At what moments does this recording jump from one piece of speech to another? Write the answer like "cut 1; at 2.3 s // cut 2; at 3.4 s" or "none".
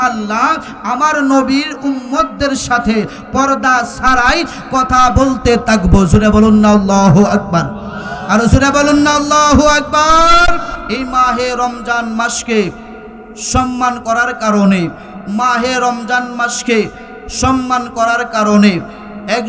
cut 1; at 10.7 s